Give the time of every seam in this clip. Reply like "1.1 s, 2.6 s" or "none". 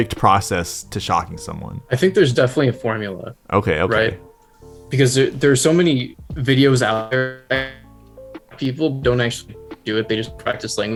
none